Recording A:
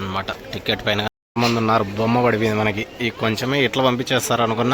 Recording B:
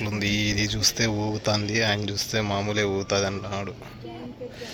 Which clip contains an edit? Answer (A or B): A